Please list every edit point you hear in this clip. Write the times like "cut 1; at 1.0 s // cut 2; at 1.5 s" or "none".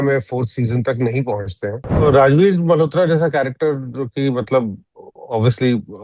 cut 1; at 2.0 s